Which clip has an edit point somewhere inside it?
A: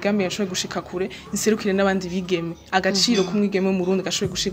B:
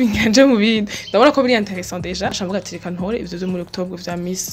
B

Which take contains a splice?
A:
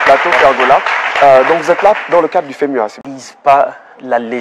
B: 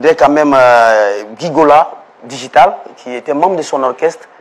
A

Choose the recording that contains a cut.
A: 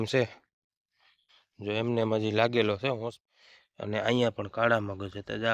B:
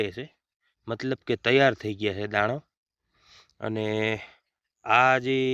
A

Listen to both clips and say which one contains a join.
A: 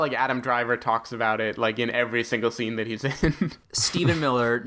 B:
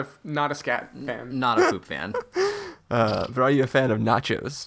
A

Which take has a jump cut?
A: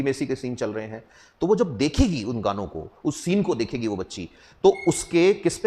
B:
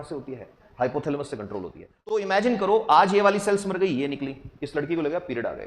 B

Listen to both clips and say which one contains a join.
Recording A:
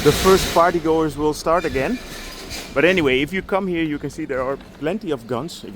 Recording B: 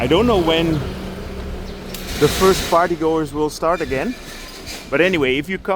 A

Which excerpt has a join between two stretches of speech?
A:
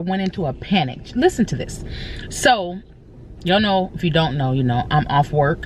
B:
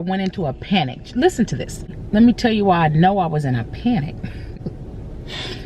B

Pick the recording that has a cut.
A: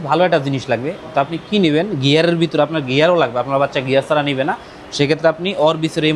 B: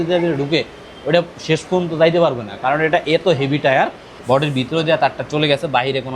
B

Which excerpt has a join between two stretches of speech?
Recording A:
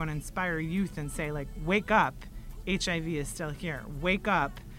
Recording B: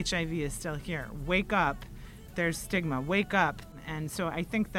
B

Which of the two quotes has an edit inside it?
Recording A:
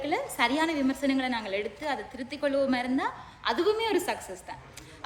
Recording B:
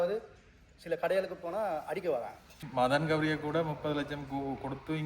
B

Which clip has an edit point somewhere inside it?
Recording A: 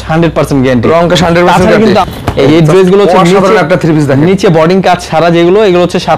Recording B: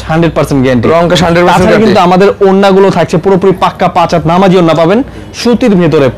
A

